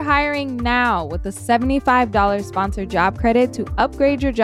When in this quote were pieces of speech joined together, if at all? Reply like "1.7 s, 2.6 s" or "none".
none